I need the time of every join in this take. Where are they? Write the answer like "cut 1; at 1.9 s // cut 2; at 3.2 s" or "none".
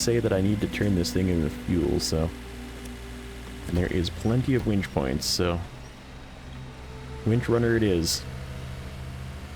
none